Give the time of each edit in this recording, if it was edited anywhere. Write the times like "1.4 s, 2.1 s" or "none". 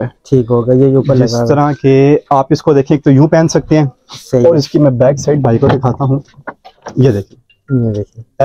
none